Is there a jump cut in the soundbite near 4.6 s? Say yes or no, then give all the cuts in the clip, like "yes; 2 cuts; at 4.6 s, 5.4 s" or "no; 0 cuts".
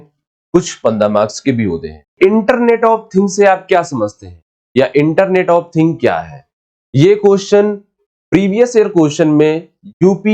no; 1 cut; at 2.1 s